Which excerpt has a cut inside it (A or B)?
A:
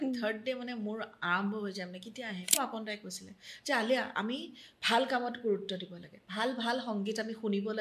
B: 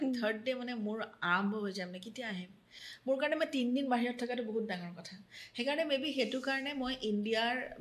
A